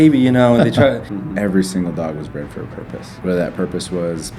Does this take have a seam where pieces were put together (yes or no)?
yes